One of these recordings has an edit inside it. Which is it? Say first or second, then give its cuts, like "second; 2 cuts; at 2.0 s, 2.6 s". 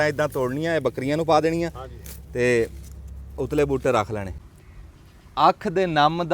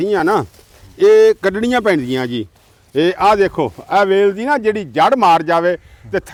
first; 1 cut; at 4.3 s